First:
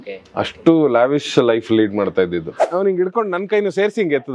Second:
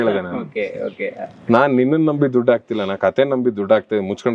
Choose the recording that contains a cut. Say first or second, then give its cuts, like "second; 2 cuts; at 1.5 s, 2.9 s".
first; 1 cut; at 2.7 s